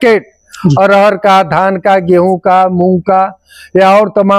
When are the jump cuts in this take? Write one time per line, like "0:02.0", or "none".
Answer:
none